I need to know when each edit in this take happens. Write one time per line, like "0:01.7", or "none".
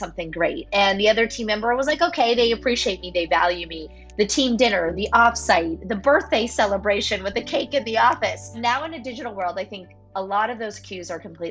0:08.6